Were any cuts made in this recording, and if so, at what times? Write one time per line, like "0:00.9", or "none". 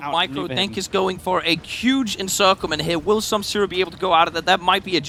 none